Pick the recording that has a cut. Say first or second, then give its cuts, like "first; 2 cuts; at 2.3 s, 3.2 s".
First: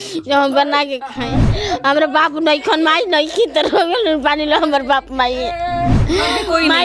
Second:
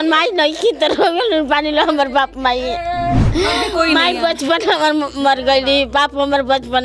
first; 1 cut; at 1.5 s